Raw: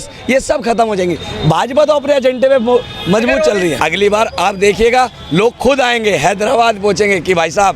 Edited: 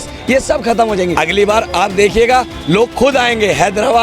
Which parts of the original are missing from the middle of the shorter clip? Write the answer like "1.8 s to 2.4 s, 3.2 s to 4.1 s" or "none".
1.2 s to 3.8 s